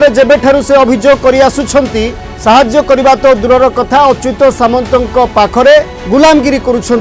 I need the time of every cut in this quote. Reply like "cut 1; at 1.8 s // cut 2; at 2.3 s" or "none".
cut 1; at 2.2 s // cut 2; at 6.0 s